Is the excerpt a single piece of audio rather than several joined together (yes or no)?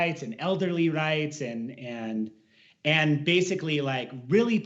yes